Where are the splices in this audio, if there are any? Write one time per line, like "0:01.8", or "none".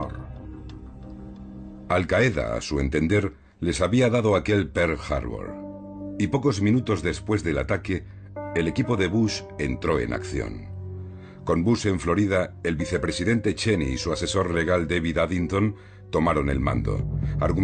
0:10.0